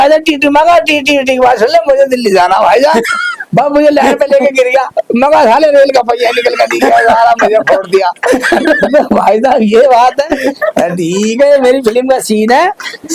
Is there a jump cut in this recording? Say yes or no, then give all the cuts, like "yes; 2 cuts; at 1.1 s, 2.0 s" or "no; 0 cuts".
no; 0 cuts